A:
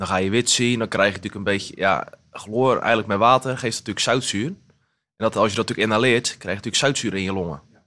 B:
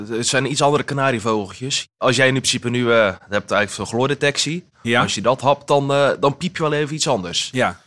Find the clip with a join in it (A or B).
B